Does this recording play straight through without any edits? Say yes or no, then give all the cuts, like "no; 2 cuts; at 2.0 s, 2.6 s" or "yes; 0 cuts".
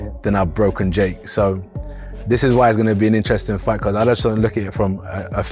yes; 0 cuts